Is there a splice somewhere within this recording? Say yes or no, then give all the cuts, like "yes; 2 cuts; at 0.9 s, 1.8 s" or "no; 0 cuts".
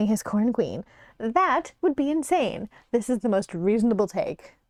no; 0 cuts